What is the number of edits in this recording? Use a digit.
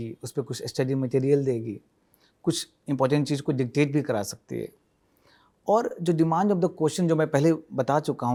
0